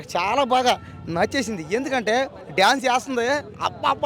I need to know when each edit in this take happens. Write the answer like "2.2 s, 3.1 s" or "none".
none

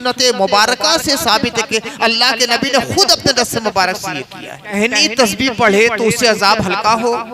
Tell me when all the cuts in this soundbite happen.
4.7 s

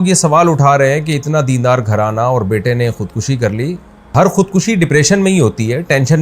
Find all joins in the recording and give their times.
4.1 s

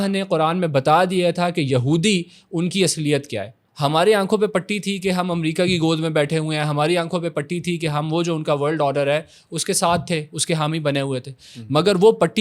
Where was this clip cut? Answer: 3.6 s

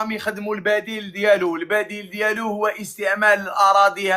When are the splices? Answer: none

